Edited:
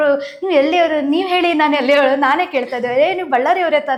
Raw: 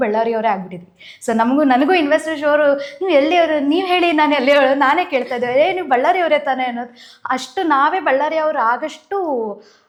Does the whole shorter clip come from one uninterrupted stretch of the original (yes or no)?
yes